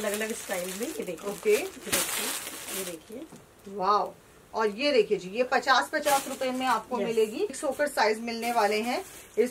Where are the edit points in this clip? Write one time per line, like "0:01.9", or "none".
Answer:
0:07.6